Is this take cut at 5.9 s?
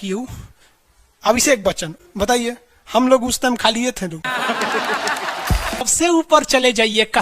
yes; 1 cut; at 5.9 s

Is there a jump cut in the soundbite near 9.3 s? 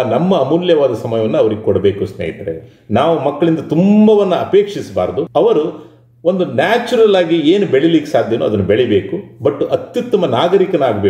no; 2 cuts; at 2.7 s, 5.3 s

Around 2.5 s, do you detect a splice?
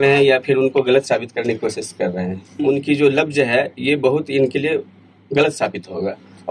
yes; 1 cut; at 2.5 s

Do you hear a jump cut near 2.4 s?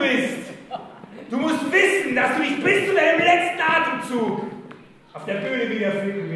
no; 0 cuts

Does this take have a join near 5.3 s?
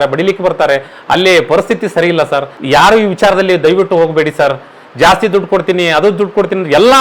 no; 1 cut; at 2.5 s

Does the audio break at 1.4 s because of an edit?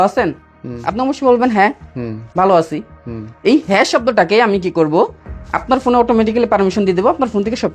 no; 0 cuts

